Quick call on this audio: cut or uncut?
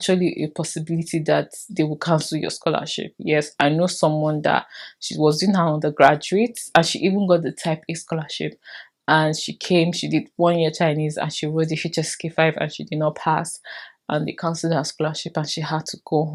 uncut